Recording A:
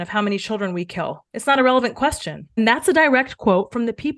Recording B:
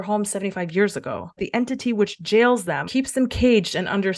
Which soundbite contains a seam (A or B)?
B